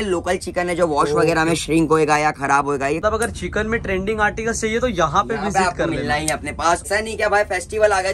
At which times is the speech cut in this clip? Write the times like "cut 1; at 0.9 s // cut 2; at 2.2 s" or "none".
cut 1; at 3.0 s // cut 2; at 6.8 s

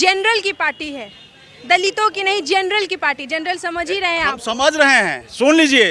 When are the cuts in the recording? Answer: none

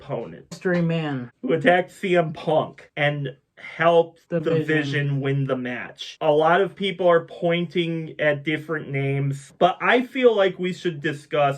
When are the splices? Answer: cut 1; at 1.3 s

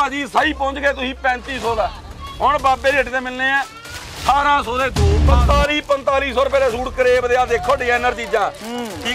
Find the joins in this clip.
cut 1; at 5.2 s

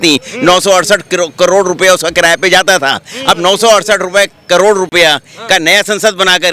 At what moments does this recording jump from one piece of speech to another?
none

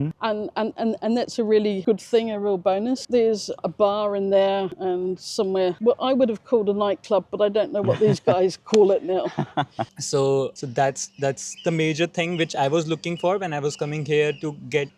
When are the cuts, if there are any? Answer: cut 1; at 9.9 s

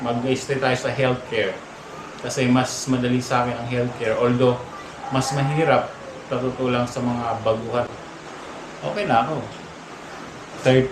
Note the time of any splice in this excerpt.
cut 1; at 7.9 s

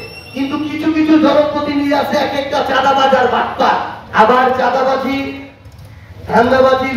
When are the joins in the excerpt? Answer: cut 1; at 4.0 s

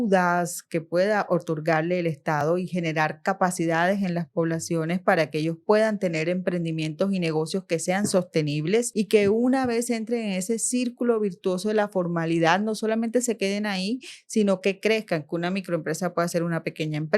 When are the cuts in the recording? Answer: cut 1; at 8.9 s

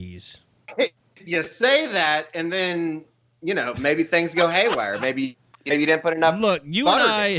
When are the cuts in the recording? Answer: cut 1; at 1.1 s

